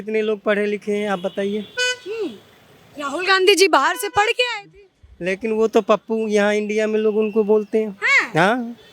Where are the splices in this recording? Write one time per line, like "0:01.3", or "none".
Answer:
none